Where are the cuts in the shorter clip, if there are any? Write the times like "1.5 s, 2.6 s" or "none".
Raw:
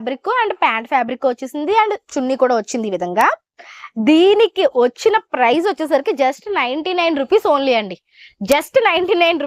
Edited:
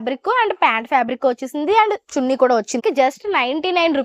2.8 s